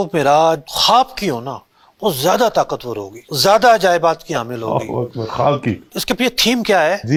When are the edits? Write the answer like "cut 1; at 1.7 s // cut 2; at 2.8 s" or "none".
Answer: none